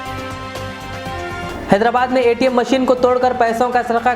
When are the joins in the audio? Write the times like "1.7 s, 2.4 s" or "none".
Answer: 1.3 s